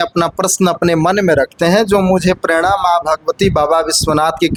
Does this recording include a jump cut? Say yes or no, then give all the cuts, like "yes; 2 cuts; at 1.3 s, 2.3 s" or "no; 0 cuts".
no; 0 cuts